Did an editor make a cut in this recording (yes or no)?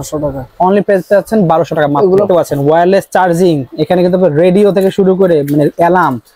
yes